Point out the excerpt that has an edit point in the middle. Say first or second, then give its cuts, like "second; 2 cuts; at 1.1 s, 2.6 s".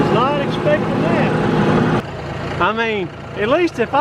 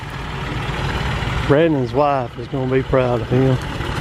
first; 1 cut; at 2.0 s